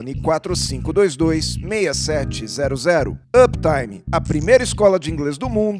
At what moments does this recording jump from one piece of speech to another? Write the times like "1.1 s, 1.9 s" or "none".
none